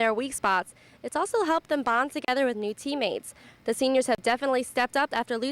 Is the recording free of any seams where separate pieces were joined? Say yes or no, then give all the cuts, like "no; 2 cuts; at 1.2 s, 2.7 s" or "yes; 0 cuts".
yes; 0 cuts